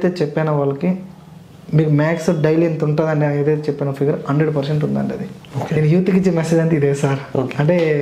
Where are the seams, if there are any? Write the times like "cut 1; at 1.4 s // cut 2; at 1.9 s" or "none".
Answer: none